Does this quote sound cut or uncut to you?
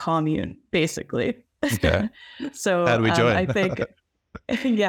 uncut